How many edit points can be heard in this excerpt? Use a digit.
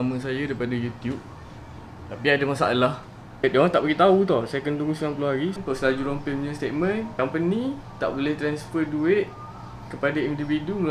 2